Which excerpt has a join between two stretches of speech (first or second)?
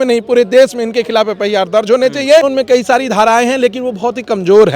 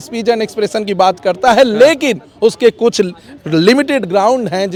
first